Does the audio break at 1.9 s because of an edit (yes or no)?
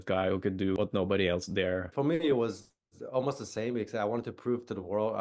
yes